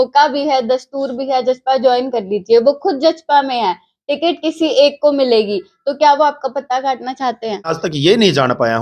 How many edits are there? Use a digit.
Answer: 1